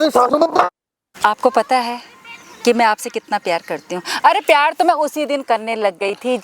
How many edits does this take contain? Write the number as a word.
one